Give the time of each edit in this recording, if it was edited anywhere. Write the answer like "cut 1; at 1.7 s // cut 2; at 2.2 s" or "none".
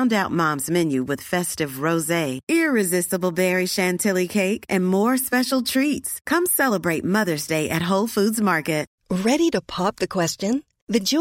cut 1; at 8.9 s